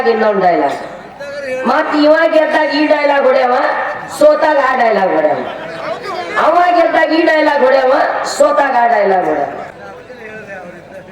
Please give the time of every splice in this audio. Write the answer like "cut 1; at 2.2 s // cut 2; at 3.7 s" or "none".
cut 1; at 9.7 s